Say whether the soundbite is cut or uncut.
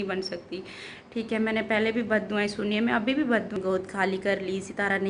cut